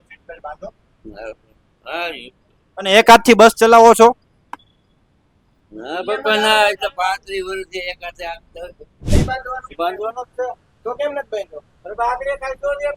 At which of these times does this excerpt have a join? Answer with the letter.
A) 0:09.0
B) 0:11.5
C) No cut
A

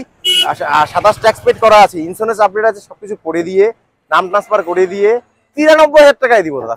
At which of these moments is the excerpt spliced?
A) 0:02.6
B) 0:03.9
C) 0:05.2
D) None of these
D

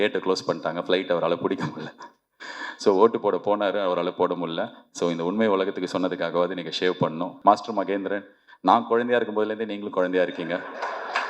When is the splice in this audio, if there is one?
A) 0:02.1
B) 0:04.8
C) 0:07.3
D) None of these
C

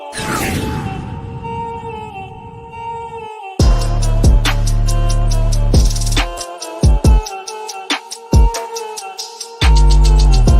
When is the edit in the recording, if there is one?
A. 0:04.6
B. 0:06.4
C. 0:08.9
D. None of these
B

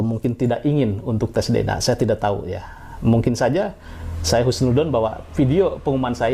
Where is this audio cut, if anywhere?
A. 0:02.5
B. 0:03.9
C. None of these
C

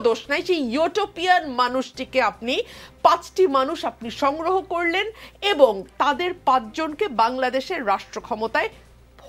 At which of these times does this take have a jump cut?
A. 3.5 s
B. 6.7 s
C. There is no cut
C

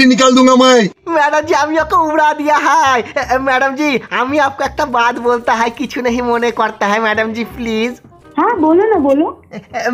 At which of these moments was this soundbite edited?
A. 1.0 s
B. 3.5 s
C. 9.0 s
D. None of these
A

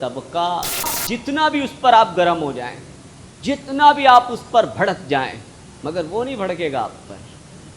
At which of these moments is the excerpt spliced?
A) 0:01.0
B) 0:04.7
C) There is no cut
A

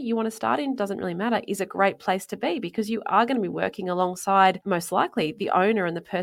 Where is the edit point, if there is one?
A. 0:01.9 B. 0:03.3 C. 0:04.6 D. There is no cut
C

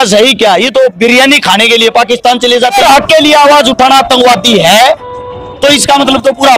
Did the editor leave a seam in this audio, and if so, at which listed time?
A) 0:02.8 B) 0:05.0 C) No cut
A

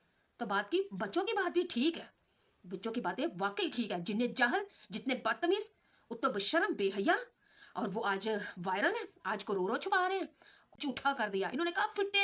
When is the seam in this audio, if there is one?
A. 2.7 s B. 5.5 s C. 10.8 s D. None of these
C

